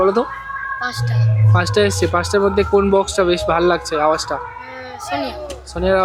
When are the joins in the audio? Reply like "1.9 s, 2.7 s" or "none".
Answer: none